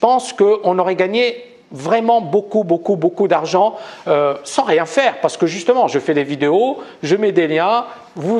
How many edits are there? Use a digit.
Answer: 1